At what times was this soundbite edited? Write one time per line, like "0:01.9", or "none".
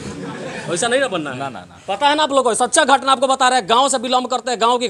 none